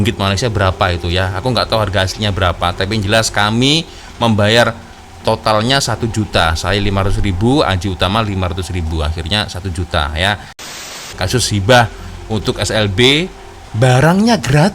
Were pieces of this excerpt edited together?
yes; 1 cut; at 10.8 s

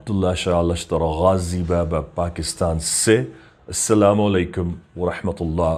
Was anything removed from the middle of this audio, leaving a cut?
no; 0 cuts

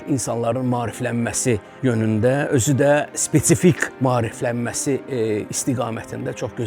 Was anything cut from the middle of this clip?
yes; 2 cuts; at 1.7 s, 3.9 s

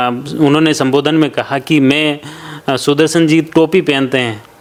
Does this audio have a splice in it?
no; 0 cuts

